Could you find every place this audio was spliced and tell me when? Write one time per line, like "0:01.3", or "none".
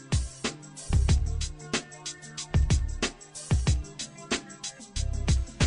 0:03.2